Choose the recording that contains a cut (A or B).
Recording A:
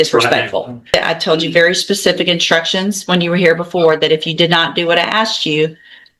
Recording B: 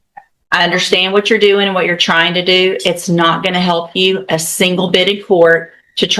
A